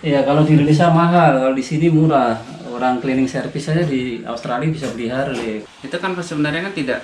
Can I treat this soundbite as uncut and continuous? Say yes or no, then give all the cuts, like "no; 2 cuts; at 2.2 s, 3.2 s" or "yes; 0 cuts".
no; 1 cut; at 5.6 s